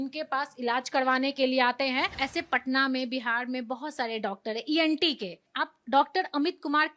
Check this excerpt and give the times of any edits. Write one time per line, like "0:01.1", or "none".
0:02.2
0:05.4